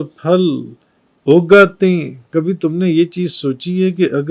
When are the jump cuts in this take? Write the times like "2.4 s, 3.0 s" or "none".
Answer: 2.2 s